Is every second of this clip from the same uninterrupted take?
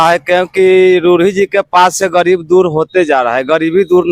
yes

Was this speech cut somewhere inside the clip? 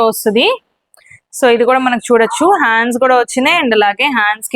no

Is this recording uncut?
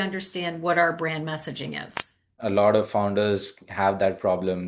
no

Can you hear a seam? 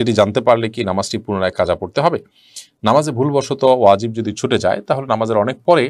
no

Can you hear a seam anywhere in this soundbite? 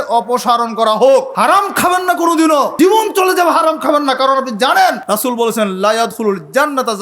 yes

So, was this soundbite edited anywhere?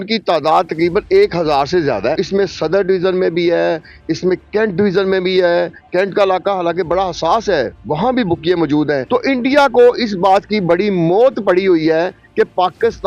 yes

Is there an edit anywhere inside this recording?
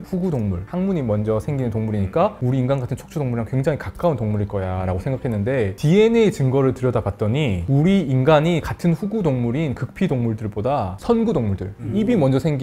no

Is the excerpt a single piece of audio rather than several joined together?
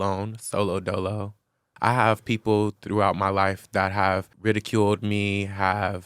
no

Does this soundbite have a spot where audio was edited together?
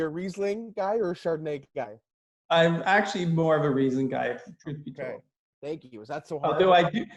no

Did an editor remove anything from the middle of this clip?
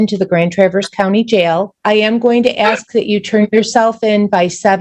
yes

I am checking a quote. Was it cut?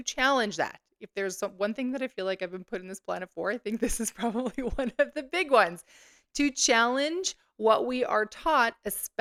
no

